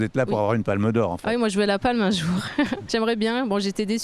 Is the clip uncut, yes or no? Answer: no